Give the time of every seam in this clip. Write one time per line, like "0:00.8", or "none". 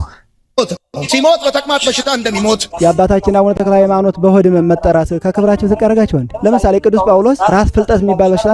none